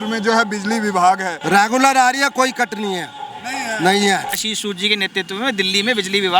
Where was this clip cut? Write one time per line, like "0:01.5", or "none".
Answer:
0:04.4